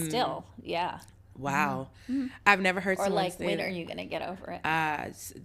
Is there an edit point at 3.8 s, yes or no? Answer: no